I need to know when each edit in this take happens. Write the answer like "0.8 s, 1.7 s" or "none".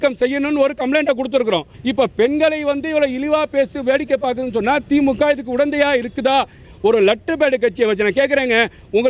1.7 s, 6.6 s